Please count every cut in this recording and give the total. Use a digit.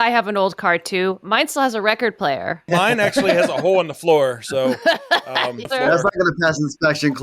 2